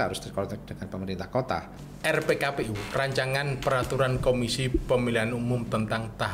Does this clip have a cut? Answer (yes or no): yes